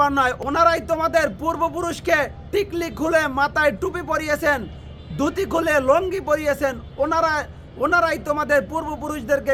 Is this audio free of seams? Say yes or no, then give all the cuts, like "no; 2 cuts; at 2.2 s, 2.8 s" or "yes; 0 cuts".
yes; 0 cuts